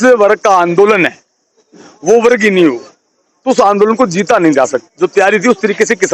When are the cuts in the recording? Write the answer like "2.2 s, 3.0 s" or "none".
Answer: 4.8 s